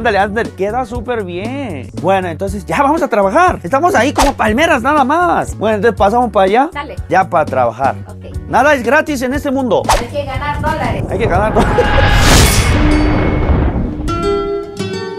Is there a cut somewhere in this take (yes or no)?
no